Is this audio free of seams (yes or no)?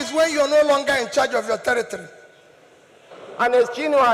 no